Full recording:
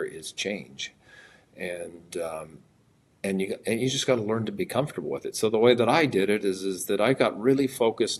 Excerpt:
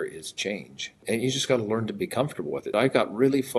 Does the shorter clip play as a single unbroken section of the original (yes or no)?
no